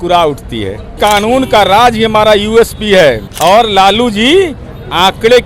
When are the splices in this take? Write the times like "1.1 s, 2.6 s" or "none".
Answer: 1.0 s, 3.3 s